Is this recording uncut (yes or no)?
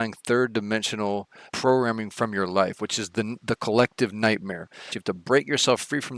no